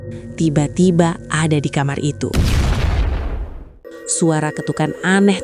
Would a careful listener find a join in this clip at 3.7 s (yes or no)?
yes